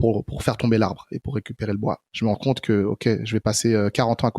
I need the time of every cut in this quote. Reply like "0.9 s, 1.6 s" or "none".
2.1 s